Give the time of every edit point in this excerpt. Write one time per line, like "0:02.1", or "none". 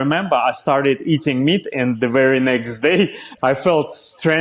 0:03.3